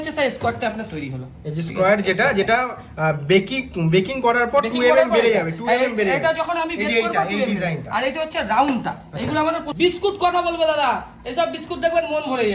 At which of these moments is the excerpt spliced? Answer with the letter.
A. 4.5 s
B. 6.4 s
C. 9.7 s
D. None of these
C